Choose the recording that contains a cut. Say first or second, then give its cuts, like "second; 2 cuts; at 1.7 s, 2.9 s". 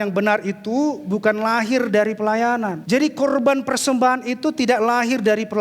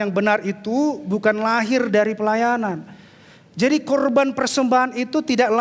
first; 1 cut; at 2.8 s